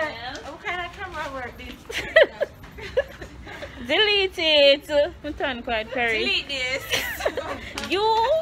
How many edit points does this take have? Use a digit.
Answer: 1